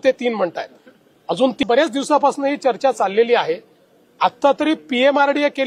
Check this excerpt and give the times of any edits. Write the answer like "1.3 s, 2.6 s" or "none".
1.6 s